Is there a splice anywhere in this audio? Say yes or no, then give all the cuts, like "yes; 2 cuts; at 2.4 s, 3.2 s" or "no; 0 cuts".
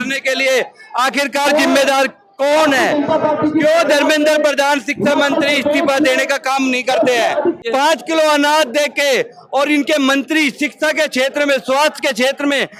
yes; 1 cut; at 7.6 s